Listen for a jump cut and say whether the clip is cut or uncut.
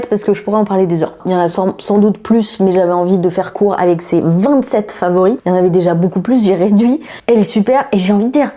cut